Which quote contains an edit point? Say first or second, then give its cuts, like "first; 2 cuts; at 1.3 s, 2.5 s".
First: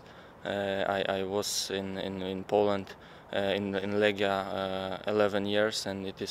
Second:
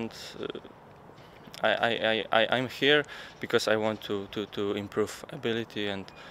first; 1 cut; at 3.4 s